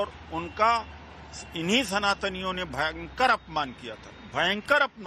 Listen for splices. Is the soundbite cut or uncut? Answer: uncut